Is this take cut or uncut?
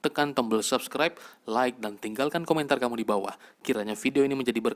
uncut